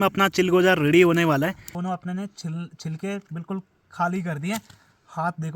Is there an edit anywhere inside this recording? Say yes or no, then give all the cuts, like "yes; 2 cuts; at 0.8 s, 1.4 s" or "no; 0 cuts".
yes; 1 cut; at 1.7 s